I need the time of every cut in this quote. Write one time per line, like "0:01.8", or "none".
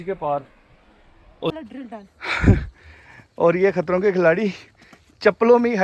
0:01.5